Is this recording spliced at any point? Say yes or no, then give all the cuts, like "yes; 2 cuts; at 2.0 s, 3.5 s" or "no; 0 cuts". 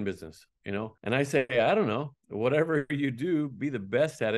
yes; 1 cut; at 0.9 s